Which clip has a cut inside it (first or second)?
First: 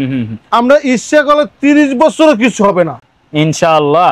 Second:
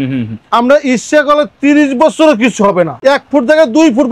second